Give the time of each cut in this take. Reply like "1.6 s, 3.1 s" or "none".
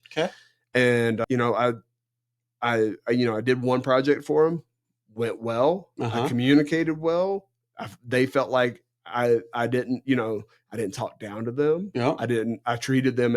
1.2 s

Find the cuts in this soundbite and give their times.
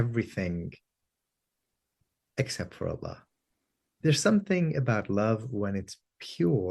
4.0 s

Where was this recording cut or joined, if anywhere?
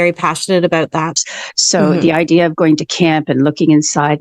1.1 s

